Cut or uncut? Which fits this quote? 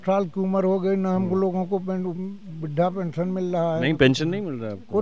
uncut